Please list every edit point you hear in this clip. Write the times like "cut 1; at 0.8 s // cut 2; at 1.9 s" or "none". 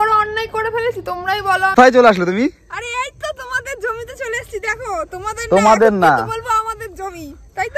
cut 1; at 1.7 s